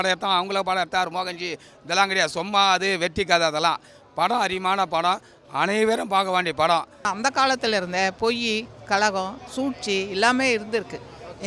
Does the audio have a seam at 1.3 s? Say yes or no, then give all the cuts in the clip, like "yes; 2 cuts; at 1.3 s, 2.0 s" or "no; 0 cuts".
no; 1 cut; at 6.9 s